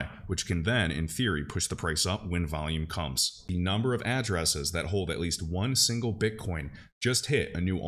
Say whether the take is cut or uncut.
cut